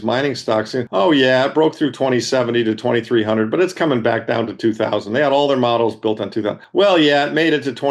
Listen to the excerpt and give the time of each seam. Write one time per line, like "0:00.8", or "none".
0:00.9
0:06.6